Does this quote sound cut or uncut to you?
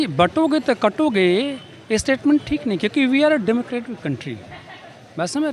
uncut